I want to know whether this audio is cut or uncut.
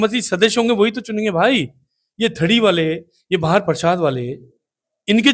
uncut